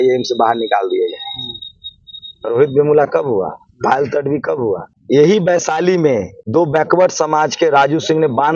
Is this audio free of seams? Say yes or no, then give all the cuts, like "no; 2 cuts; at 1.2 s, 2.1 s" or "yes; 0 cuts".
no; 2 cuts; at 4.9 s, 6.4 s